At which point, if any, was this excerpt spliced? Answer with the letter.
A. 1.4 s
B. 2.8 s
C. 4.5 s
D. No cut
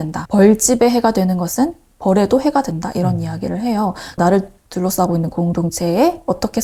D